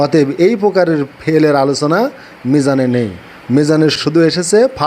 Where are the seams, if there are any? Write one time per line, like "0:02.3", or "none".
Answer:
0:04.0